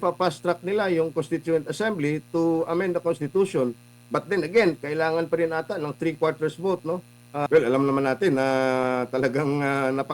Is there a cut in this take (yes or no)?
yes